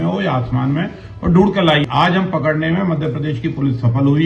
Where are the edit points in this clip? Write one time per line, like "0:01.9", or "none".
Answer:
0:01.9

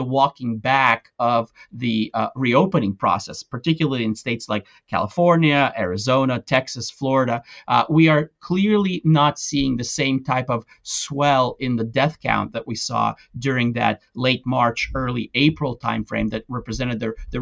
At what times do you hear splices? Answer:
none

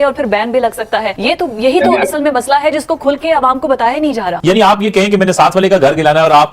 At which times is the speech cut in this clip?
0:01.1
0:04.3

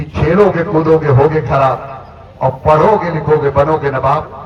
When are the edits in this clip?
none

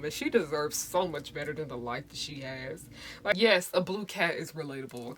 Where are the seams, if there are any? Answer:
0:03.3

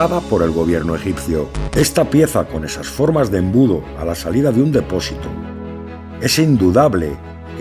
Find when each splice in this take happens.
0:01.6

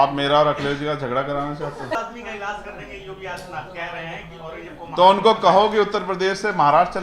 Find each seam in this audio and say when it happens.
0:02.0

